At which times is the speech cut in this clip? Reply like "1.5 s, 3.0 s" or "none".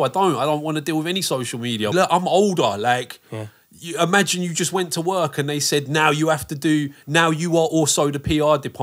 1.9 s